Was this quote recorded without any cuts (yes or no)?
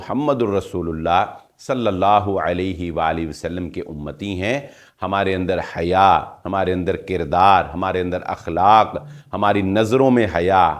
yes